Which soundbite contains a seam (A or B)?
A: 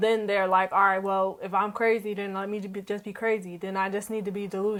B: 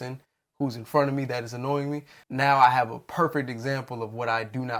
B